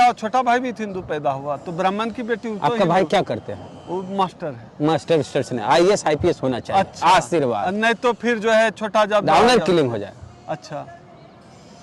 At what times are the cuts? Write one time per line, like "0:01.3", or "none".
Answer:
none